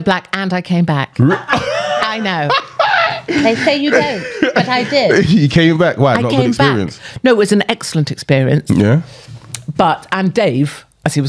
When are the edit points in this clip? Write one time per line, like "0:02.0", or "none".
none